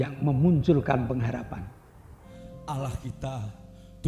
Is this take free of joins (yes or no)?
no